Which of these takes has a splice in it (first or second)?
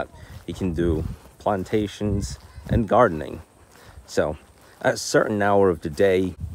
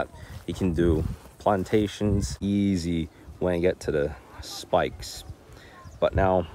second